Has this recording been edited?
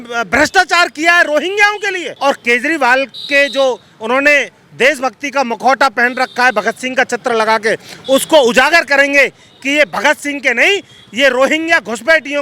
yes; 1 cut; at 2.0 s

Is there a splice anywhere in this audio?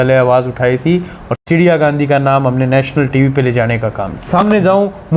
yes; 2 cuts; at 1.3 s, 4.4 s

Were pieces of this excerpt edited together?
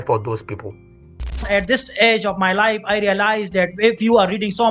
yes; 1 cut; at 1.4 s

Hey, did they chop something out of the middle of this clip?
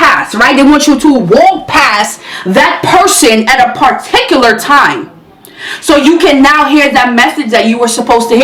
no; 0 cuts

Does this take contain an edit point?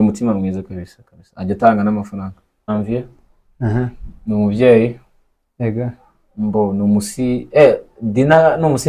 yes; 1 cut; at 2.7 s

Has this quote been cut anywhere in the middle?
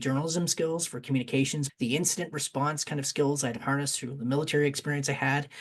yes; 1 cut; at 1.6 s

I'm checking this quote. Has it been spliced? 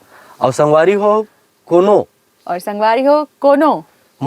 no; 0 cuts

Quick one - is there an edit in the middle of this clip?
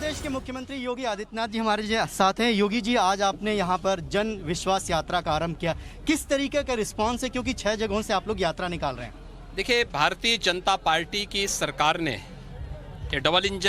no; 0 cuts

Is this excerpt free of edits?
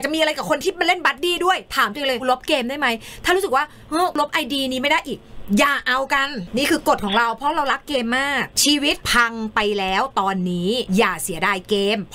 no; 5 cuts; at 2.2 s, 4.2 s, 6.4 s, 9.0 s, 10.8 s

